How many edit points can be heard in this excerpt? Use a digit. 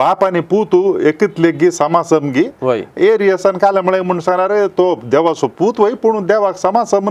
0